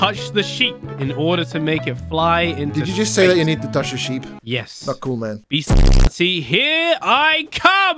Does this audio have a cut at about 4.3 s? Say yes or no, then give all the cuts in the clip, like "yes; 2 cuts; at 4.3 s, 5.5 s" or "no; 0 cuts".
yes; 2 cuts; at 4.3 s, 5.4 s